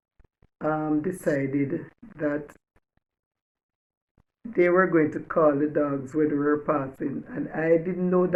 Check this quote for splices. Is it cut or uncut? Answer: uncut